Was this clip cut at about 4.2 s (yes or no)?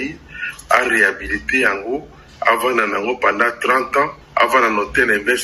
yes